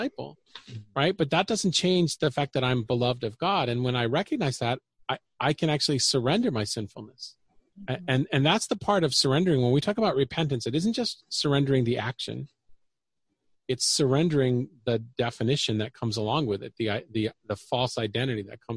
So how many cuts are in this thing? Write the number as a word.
one